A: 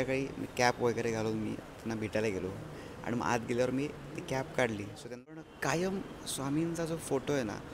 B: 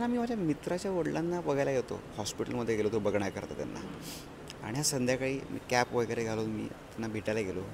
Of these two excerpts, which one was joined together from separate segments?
A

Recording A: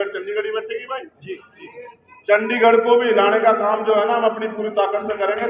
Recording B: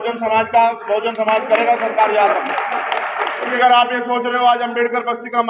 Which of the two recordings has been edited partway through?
B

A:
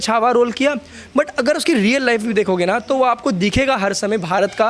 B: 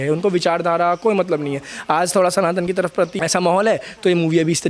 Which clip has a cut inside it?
B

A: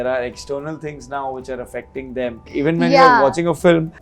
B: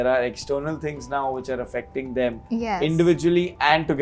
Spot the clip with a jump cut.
A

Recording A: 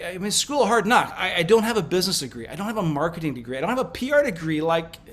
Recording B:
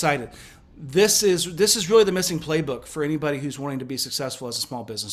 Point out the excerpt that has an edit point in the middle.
A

